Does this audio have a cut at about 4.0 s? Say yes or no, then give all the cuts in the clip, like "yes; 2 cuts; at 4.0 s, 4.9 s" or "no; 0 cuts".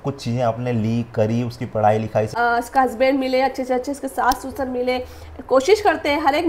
no; 1 cut; at 2.3 s